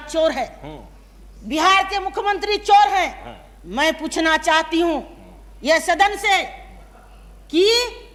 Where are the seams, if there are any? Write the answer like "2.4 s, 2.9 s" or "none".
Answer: none